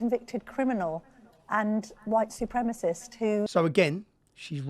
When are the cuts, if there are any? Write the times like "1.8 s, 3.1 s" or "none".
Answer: 3.5 s